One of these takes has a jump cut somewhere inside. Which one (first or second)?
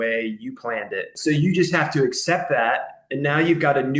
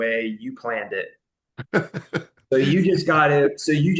first